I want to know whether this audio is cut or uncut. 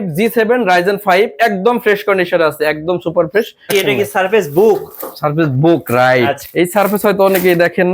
cut